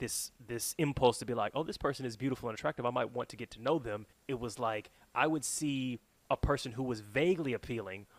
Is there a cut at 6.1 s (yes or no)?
yes